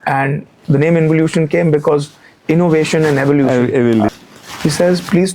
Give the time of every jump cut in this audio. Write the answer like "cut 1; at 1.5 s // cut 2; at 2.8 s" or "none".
cut 1; at 4.1 s